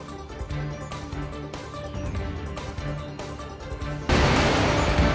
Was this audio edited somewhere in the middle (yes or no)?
no